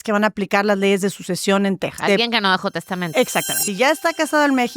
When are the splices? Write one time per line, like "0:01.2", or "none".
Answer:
0:02.0
0:03.7